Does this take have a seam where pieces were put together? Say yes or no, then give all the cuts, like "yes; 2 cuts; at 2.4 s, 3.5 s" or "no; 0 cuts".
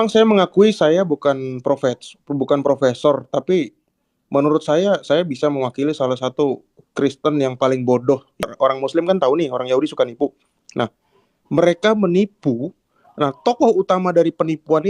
yes; 1 cut; at 8.4 s